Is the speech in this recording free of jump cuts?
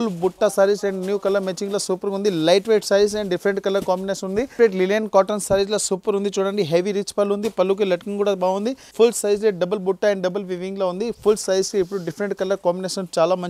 no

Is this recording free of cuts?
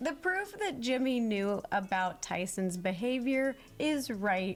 yes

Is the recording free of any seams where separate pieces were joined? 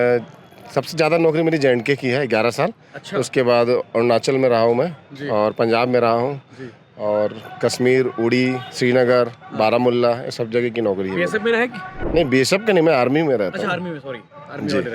yes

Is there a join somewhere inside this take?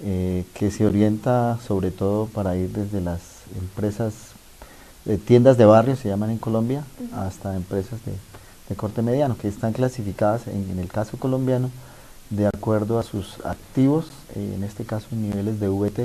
yes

